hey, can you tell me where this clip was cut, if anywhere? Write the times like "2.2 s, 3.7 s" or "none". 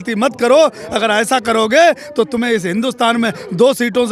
none